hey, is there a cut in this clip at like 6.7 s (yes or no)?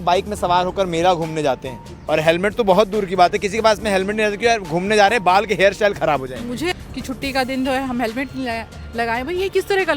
yes